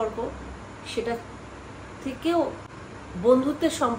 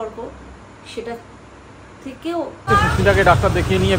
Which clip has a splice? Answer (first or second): second